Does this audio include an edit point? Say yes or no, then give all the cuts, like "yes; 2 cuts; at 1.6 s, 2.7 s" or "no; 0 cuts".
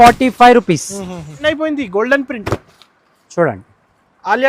yes; 1 cut; at 1.4 s